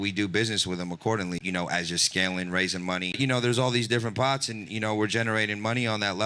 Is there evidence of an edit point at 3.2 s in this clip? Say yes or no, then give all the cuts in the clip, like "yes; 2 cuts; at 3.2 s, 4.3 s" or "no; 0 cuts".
yes; 2 cuts; at 1.4 s, 3.2 s